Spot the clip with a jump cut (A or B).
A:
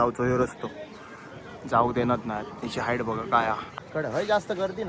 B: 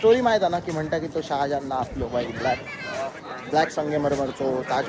A